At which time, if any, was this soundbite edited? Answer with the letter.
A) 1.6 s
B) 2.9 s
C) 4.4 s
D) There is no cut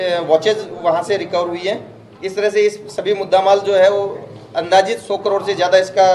D